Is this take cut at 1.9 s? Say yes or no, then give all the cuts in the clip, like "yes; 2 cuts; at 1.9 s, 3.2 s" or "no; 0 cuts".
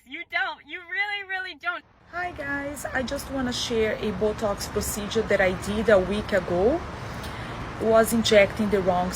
yes; 1 cut; at 1.9 s